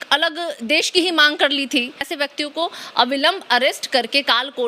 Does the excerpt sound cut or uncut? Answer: cut